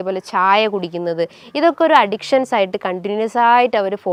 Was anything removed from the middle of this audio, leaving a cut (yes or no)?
no